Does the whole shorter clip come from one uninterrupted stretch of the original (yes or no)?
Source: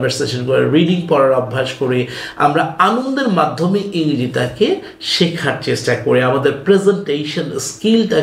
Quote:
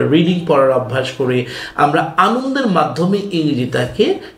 yes